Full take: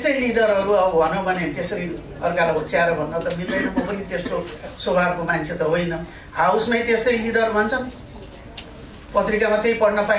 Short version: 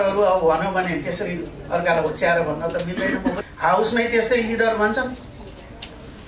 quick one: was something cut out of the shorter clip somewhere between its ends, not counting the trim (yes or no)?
yes